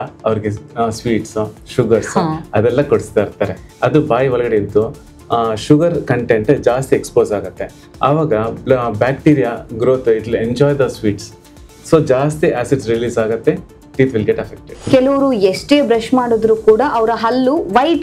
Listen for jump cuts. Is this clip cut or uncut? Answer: cut